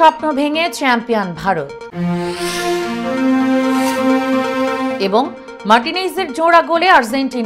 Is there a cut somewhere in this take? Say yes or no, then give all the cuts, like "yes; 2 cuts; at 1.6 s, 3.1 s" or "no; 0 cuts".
no; 0 cuts